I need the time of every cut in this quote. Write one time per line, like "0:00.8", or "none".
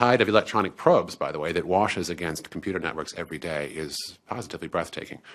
0:02.9